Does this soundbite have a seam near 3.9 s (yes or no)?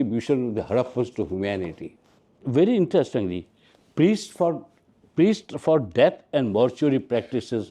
no